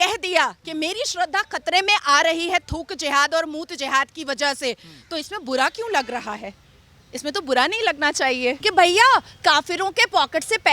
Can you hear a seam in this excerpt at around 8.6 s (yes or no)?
yes